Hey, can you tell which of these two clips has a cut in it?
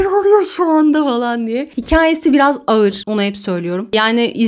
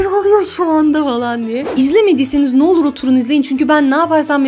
second; 1 cut; at 1.7 s

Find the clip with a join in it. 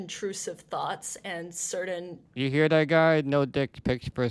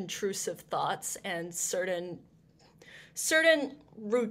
first; 1 cut; at 2.2 s

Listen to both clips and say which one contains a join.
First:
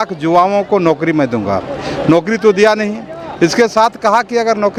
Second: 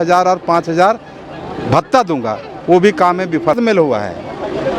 second; 1 cut; at 3.6 s

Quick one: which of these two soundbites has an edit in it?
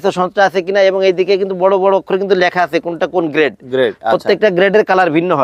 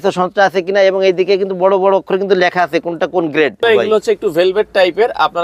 second; 1 cut; at 3.6 s

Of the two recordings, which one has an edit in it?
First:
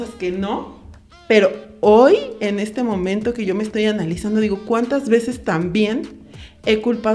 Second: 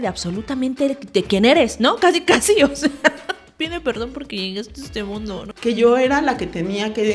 second; 1 cut; at 5.4 s

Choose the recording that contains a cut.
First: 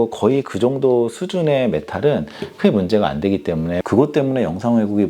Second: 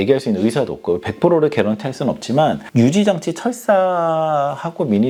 first; 1 cut; at 3.8 s

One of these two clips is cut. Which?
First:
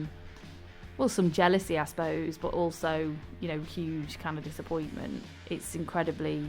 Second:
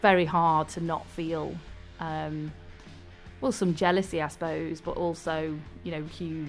first; 1 cut; at 5.2 s

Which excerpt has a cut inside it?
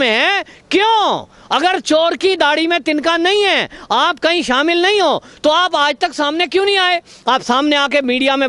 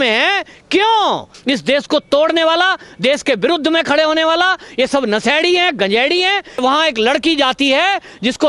second; 2 cuts; at 1.3 s, 6.6 s

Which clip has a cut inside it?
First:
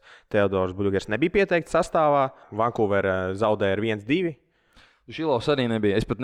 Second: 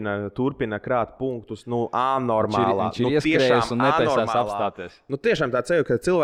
first; 1 cut; at 2.4 s

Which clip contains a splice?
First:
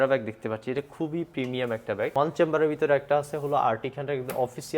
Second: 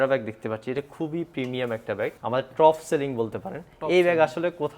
first; 1 cut; at 2.1 s

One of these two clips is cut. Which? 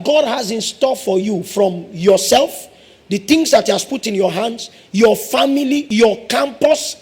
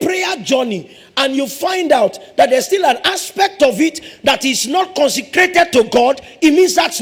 first; 1 cut; at 5.9 s

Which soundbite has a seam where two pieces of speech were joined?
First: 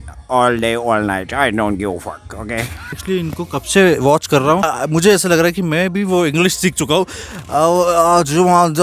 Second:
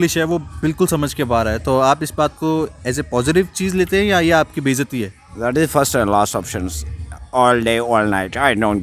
first; 2 cuts; at 3.0 s, 4.6 s

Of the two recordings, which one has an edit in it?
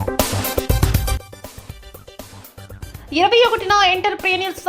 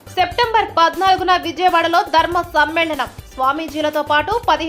first; 2 cuts; at 1.2 s, 2.8 s

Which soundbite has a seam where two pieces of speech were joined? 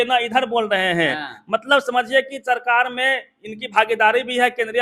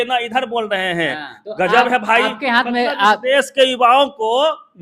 second; 1 cut; at 1.3 s

